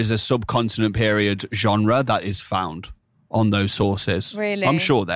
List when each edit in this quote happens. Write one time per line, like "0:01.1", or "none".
none

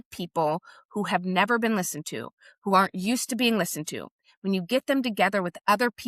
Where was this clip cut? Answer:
none

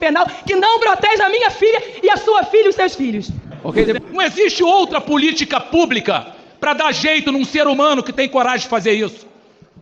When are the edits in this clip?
0:04.0

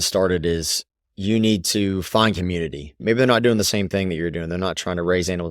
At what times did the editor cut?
0:03.0

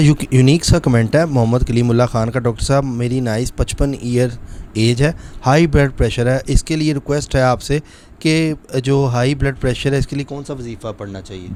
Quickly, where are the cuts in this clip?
none

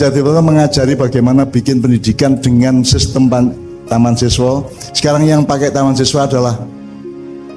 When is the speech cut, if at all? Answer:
0:06.7

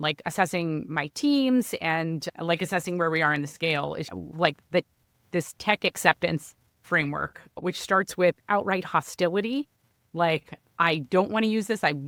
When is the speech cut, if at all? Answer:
none

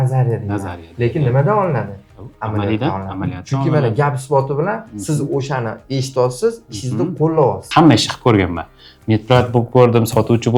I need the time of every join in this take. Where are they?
0:07.6

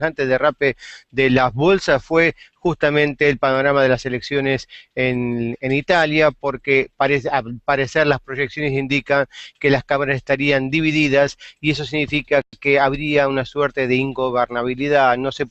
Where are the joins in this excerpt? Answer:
none

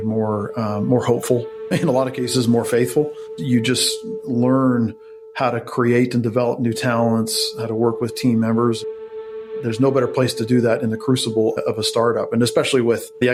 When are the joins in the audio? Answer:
none

